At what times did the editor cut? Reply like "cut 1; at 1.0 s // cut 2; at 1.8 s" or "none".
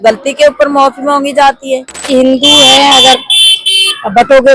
cut 1; at 2.0 s